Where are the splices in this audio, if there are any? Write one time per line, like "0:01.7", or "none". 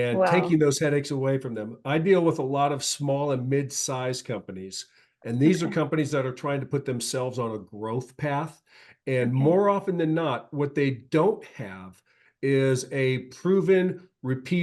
none